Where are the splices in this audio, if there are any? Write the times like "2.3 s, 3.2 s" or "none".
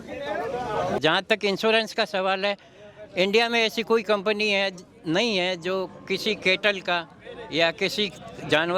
1.0 s